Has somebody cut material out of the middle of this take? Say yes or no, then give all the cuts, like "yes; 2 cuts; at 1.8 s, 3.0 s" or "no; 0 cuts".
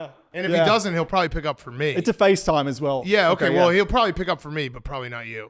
no; 0 cuts